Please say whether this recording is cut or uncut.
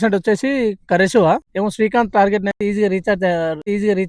uncut